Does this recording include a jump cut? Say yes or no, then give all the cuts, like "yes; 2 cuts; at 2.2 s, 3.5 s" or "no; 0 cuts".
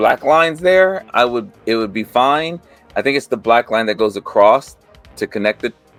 no; 0 cuts